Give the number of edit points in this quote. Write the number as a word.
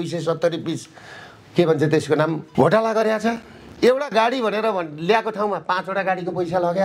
one